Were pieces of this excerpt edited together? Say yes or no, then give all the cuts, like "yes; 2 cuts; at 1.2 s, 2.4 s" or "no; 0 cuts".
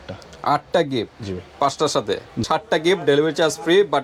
yes; 1 cut; at 2.4 s